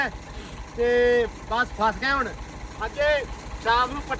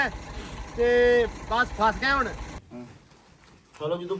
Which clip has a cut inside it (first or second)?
second